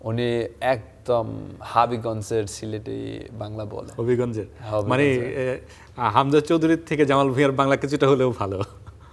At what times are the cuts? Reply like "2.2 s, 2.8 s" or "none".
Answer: none

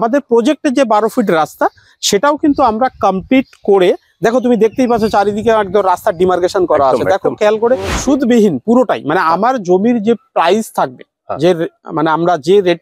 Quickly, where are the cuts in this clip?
7.9 s

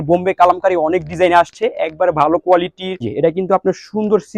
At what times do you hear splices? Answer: 3.1 s

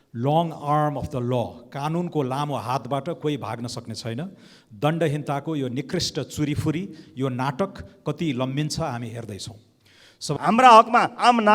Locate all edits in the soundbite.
10.2 s

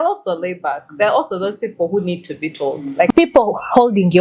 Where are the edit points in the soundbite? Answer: 3.1 s

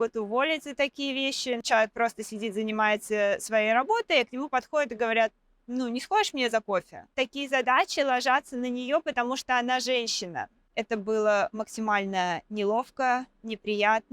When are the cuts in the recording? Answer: 1.6 s, 7.1 s, 10.7 s

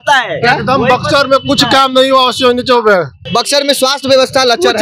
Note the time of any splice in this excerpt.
3.2 s

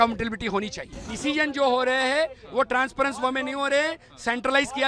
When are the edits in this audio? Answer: 1.1 s

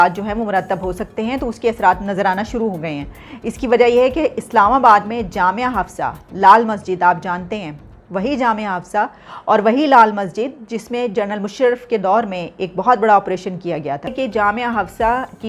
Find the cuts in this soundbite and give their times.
14.1 s

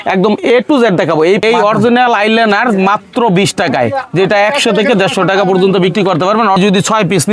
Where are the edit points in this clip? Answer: 1.4 s, 6.6 s

